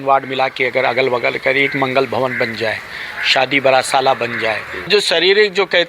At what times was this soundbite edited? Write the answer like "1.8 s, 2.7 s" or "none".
4.9 s